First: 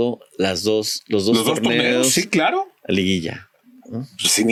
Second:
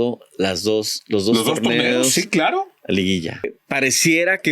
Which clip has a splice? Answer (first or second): second